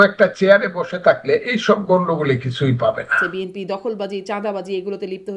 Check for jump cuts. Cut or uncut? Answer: cut